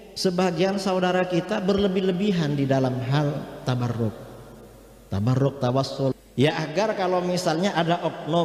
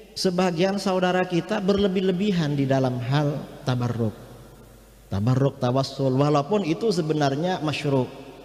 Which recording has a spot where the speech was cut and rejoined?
first; 1 cut; at 6.1 s

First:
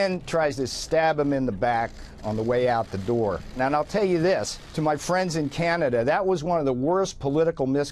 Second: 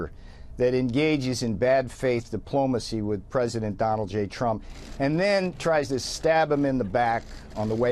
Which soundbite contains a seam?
first; 2 cuts; at 3.6 s, 4.6 s

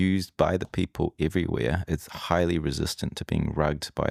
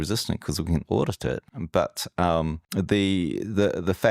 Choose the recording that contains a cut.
second; 2 cuts; at 1.5 s, 2.6 s

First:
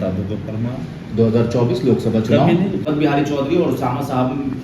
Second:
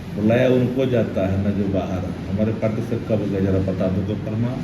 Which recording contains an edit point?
first; 1 cut; at 2.9 s

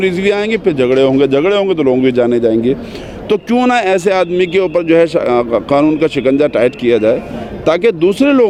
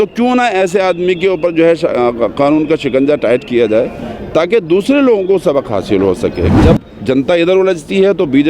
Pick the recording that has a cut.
second; 1 cut; at 6.5 s

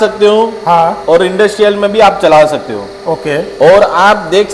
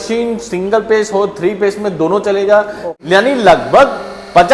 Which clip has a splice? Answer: second; 1 cut; at 2.9 s

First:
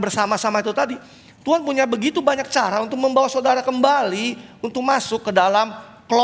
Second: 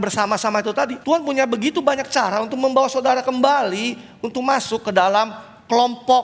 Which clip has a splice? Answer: second; 1 cut; at 1.0 s

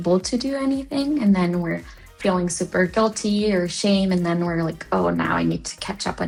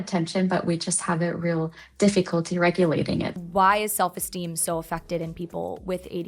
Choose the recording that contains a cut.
second; 1 cut; at 3.4 s

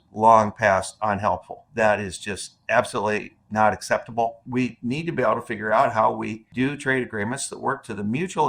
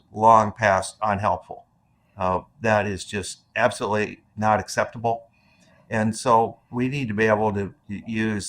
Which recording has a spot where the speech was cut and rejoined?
first; 3 cuts; at 1.6 s, 4.4 s, 6.5 s

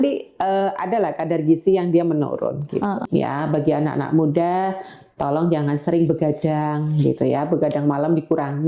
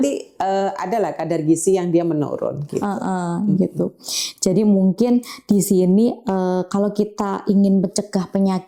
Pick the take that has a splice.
first; 1 cut; at 3.0 s

